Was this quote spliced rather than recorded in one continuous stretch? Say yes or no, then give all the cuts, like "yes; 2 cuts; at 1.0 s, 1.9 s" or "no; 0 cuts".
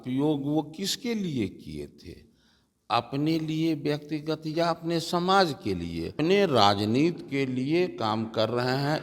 yes; 1 cut; at 6.1 s